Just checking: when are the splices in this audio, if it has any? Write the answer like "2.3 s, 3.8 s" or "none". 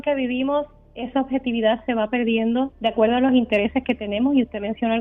2.7 s